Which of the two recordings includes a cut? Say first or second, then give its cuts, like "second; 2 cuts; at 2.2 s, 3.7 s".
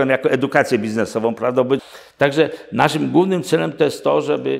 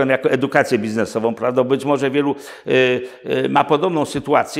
first; 1 cut; at 1.8 s